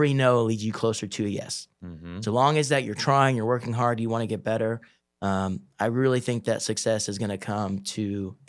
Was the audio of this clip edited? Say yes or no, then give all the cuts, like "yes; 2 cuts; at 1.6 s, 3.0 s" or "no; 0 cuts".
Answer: no; 0 cuts